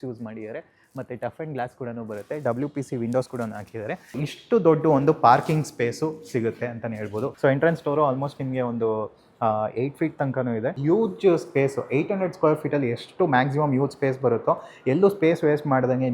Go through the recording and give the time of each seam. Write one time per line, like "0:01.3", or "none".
0:04.2
0:07.3
0:10.8